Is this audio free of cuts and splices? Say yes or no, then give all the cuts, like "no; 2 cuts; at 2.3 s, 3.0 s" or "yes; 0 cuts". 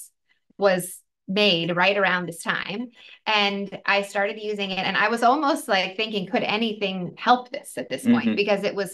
yes; 0 cuts